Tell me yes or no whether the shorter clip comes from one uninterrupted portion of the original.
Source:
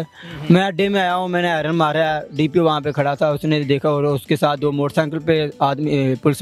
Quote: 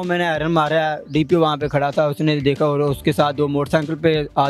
yes